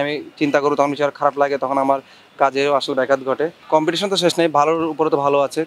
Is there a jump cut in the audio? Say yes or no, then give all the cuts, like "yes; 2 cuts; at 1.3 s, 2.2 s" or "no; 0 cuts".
yes; 1 cut; at 3.6 s